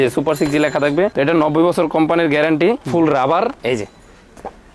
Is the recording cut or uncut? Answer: cut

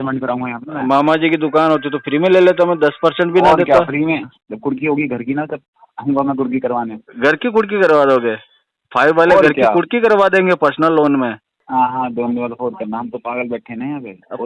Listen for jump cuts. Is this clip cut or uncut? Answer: cut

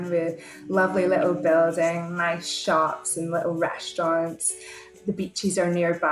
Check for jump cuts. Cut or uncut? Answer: cut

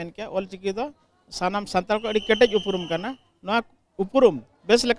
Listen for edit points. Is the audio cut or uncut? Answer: uncut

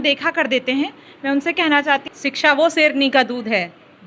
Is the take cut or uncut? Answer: cut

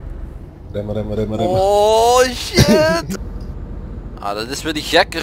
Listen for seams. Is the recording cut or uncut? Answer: cut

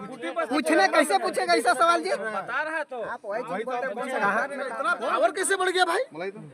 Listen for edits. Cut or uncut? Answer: cut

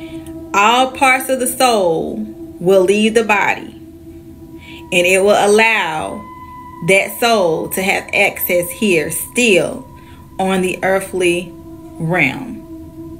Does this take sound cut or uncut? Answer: uncut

